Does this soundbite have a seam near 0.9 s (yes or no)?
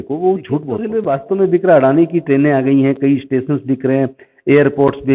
yes